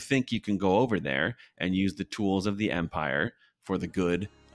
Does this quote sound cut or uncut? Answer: uncut